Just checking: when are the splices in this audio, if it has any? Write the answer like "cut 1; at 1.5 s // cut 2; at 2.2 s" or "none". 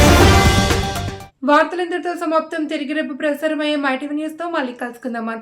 none